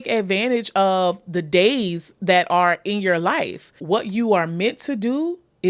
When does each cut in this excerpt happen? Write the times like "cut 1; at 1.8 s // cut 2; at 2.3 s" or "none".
cut 1; at 3.8 s